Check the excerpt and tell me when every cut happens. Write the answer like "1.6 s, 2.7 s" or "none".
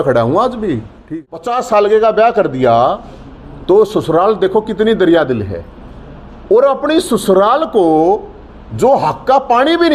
0.9 s